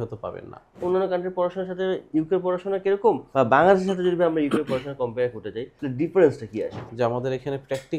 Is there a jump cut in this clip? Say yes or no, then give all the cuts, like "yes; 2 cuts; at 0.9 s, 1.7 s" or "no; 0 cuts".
yes; 5 cuts; at 0.8 s, 2.0 s, 3.2 s, 5.7 s, 6.9 s